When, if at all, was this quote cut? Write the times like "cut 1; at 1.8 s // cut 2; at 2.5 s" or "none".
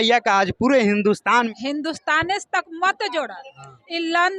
cut 1; at 1.5 s

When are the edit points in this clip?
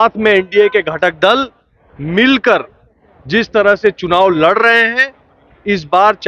none

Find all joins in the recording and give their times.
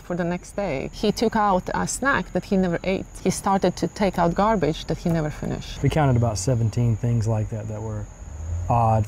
cut 1; at 0.9 s // cut 2; at 3.1 s // cut 3; at 5.6 s

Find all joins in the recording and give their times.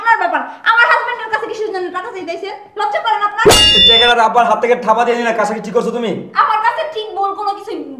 cut 1; at 3.8 s

